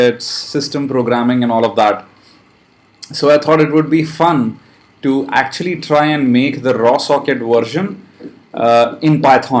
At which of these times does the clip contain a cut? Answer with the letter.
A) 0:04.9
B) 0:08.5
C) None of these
B